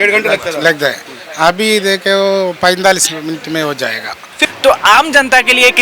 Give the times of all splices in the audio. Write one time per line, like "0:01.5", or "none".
0:04.4